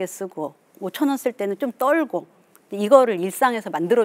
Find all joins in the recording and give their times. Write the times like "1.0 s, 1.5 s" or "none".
none